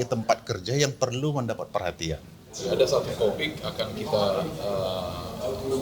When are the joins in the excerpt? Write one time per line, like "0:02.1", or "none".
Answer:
0:02.6